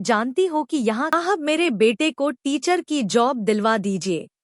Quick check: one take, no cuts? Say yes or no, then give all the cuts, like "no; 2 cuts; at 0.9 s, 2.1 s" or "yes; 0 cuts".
no; 1 cut; at 1.1 s